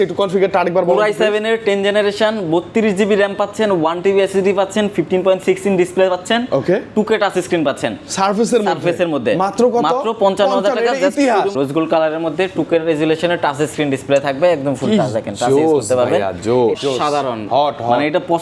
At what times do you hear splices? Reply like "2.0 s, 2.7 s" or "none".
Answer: 11.5 s, 16.8 s